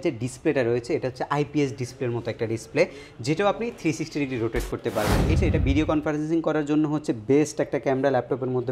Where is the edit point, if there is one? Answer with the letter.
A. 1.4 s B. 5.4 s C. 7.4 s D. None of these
B